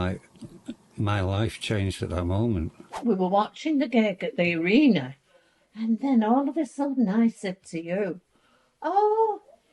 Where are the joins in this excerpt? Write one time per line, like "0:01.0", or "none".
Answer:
0:03.0